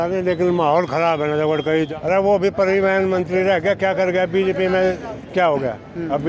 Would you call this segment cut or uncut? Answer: cut